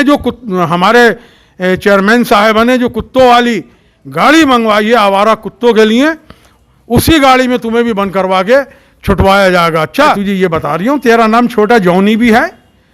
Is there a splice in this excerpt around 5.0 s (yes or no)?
no